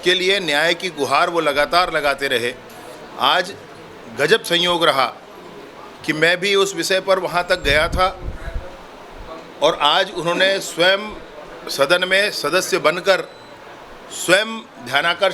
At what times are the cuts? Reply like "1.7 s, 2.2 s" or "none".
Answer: none